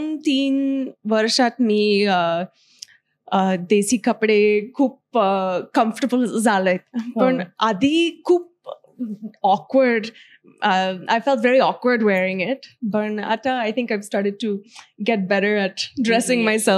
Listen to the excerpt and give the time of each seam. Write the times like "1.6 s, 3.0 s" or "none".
none